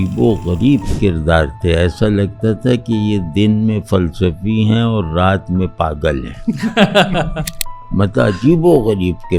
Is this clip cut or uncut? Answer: uncut